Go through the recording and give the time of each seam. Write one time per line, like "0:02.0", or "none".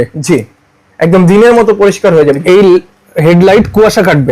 0:02.4